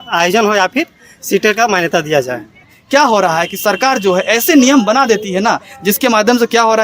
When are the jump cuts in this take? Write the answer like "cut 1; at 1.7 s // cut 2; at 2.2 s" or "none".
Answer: cut 1; at 2.8 s